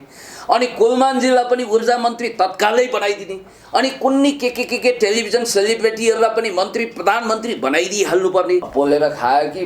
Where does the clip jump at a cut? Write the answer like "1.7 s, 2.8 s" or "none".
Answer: 8.7 s